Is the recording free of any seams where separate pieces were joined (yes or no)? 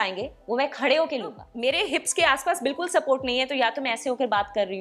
no